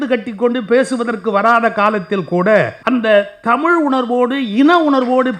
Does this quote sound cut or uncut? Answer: cut